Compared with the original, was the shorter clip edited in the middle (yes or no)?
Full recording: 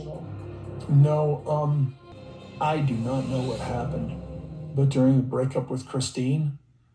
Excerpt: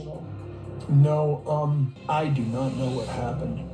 yes